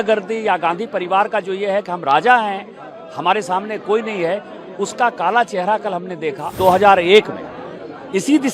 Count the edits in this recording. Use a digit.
1